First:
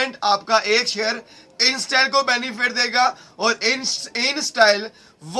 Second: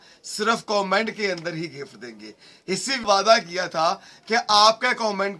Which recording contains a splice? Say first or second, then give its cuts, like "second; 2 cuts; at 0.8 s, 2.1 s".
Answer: second; 1 cut; at 3.0 s